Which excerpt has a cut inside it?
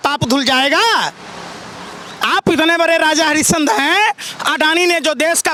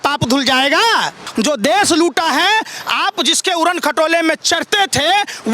second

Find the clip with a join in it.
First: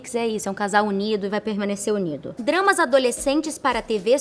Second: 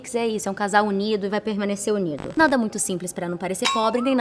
second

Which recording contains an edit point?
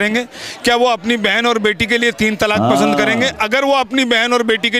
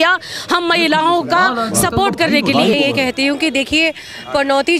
second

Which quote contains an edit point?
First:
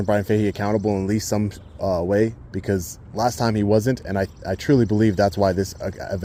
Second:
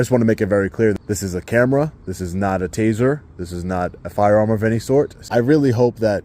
second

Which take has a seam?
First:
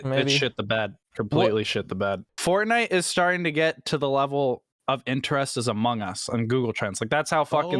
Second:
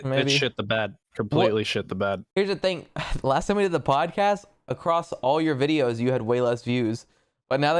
first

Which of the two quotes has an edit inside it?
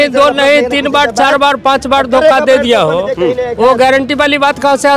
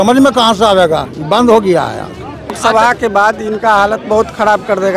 second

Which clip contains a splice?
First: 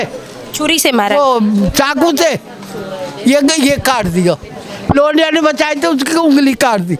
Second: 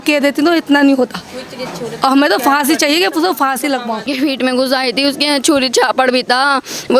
second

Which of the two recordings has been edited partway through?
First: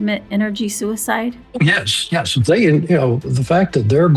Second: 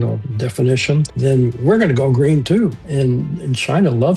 second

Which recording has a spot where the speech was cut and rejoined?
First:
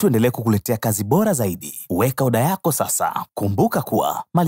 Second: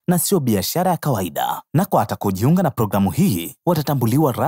first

